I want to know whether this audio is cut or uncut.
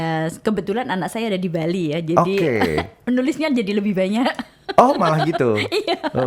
uncut